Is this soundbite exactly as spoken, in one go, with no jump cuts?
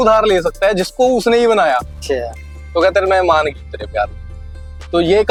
yes; 0 cuts

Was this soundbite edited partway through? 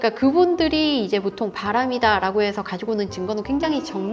no; 0 cuts

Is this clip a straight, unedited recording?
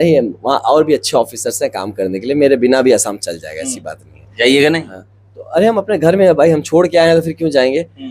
yes; 0 cuts

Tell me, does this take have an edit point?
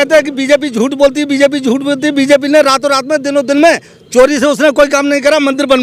no; 0 cuts

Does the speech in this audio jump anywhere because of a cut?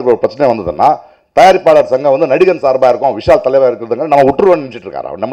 no; 0 cuts

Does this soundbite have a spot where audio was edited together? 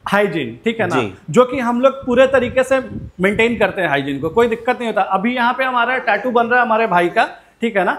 no; 0 cuts

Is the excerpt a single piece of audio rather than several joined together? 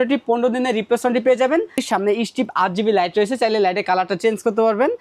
no; 1 cut; at 1.8 s

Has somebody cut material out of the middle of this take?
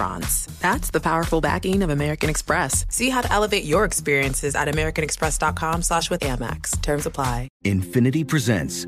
yes; 1 cut; at 7.5 s

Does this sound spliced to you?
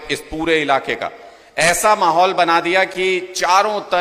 no; 0 cuts

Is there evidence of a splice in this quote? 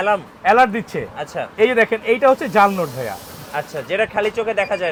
no; 0 cuts

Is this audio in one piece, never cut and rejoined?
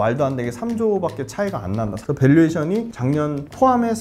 no; 2 cuts; at 1.9 s, 3.2 s

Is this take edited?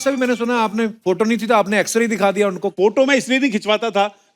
yes; 2 cuts; at 1.0 s, 2.7 s

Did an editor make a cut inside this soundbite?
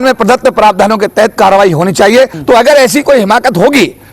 yes; 1 cut; at 2.4 s

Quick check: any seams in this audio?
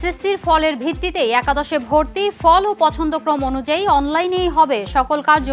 no; 0 cuts

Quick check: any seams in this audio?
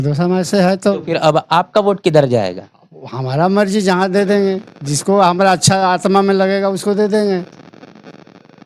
no; 0 cuts

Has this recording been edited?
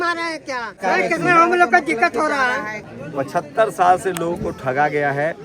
yes; 2 cuts; at 0.8 s, 2.8 s

